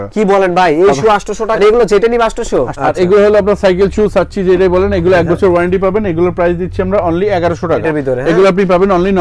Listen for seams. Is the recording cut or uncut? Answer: cut